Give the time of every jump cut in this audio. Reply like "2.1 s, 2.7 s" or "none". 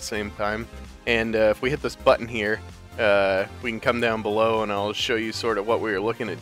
2.4 s